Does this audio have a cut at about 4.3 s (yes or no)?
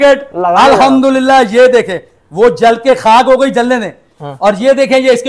no